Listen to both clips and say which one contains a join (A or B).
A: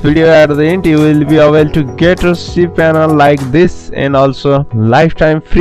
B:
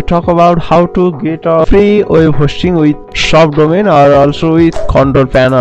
B